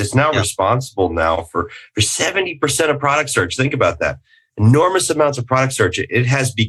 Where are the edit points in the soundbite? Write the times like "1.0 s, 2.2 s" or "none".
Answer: none